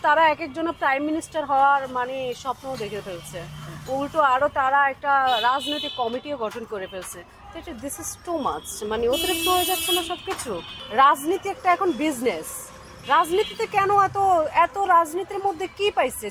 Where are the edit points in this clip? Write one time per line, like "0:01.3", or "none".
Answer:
0:10.7